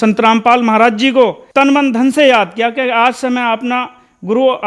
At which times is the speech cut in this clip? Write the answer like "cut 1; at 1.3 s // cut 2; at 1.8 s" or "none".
cut 1; at 1.4 s